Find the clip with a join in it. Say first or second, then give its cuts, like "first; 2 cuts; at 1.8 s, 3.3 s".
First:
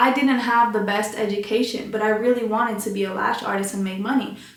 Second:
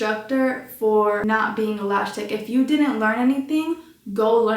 second; 1 cut; at 1.2 s